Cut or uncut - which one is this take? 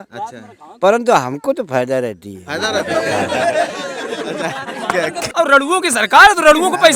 cut